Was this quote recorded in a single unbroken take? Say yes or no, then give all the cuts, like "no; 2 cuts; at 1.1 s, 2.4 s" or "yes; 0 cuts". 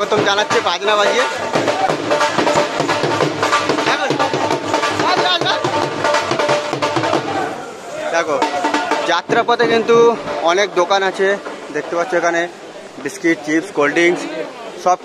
yes; 0 cuts